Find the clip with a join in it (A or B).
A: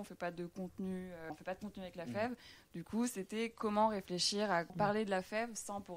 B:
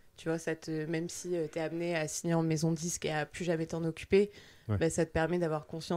A